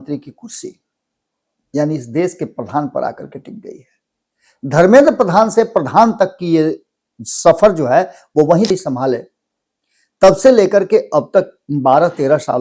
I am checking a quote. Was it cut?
yes; 1 cut; at 8.7 s

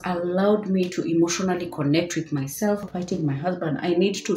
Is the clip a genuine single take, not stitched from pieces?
no; 1 cut; at 2.9 s

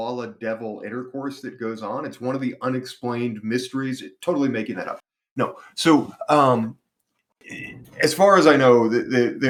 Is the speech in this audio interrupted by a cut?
no; 0 cuts

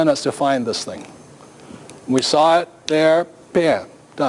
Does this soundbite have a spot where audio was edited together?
yes; 1 cut; at 3.0 s

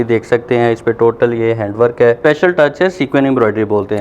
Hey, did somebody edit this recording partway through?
yes; 1 cut; at 2.2 s

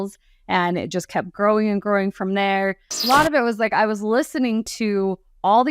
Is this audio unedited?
no; 1 cut; at 3.0 s

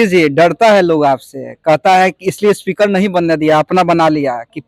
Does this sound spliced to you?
no; 0 cuts

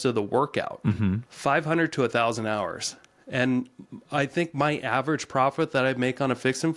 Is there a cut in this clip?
yes; 1 cut; at 1.3 s

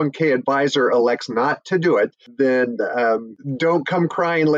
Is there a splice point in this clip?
yes; 2 cuts; at 2.2 s, 3.4 s

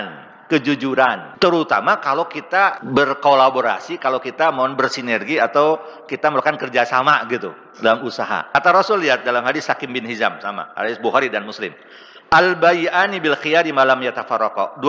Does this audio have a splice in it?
yes; 3 cuts; at 1.3 s, 2.8 s, 8.5 s

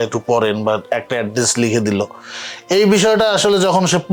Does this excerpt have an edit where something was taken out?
no; 0 cuts

